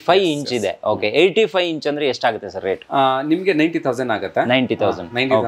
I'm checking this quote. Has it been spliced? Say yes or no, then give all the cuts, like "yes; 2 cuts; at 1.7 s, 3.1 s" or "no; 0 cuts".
no; 0 cuts